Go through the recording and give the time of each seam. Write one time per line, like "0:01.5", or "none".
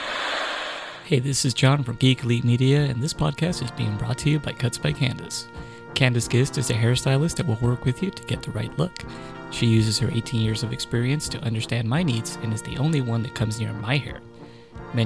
0:00.9